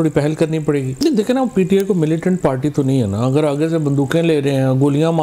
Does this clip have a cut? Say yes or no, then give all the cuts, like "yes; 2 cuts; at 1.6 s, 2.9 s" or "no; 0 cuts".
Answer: yes; 1 cut; at 0.9 s